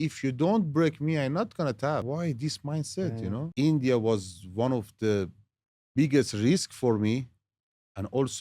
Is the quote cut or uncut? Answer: cut